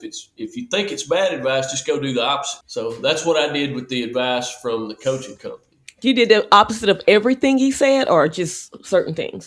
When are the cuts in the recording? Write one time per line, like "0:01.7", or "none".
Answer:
0:02.6